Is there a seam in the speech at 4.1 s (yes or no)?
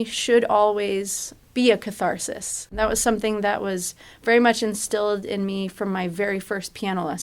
no